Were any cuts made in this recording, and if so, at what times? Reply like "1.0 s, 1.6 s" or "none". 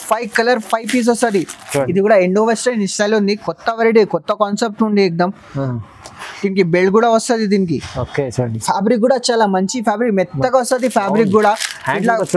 1.9 s

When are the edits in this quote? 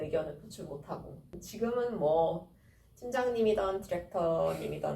1.4 s

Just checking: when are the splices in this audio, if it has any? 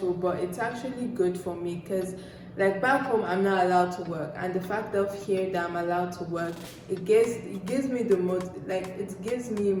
none

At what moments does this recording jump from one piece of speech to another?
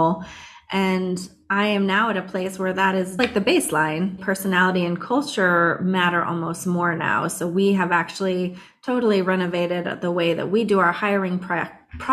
3.1 s, 4.2 s

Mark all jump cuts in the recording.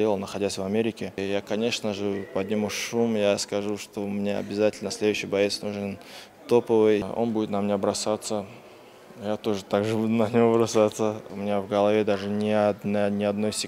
1.2 s, 7.0 s, 11.2 s

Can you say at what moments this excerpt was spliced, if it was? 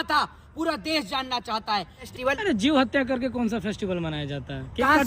2.0 s

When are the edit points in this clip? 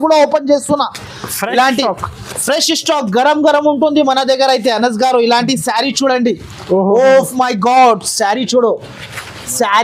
none

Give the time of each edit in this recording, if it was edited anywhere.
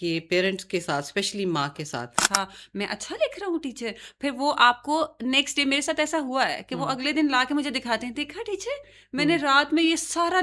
2.2 s

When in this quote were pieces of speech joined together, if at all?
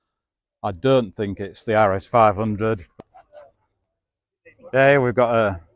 2.9 s

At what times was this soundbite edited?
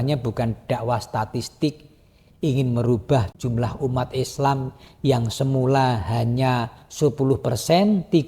3.3 s

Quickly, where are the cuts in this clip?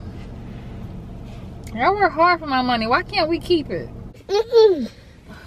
4.2 s

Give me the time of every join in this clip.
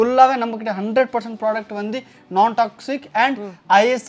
none

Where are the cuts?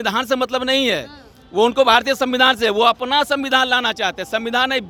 none

